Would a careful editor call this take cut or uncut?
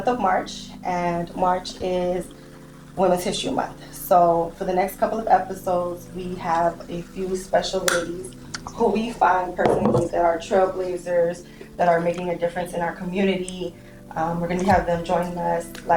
uncut